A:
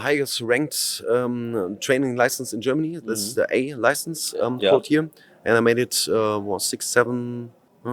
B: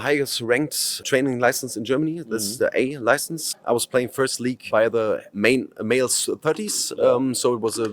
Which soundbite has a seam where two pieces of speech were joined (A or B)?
B